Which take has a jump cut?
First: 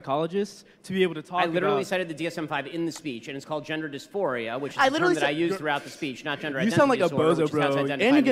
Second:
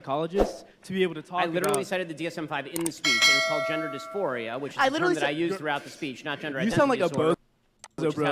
first; 1 cut; at 7.2 s

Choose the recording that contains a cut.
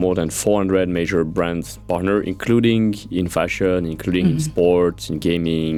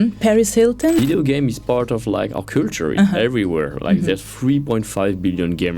second; 1 cut; at 1.0 s

